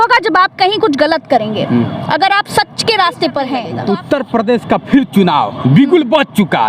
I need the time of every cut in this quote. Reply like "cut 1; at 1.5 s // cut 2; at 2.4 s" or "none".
cut 1; at 3.7 s